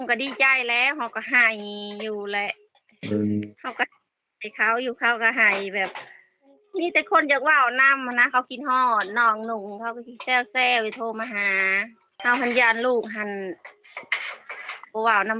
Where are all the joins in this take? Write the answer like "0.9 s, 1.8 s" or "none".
12.2 s